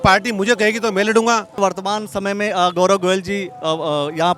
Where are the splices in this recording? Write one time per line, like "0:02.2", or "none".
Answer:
0:01.6